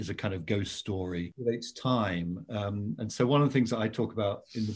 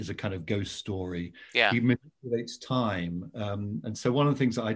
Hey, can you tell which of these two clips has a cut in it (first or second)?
first